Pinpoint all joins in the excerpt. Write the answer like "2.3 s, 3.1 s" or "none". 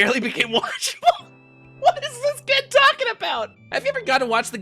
3.6 s